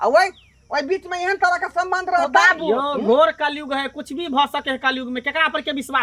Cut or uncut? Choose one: uncut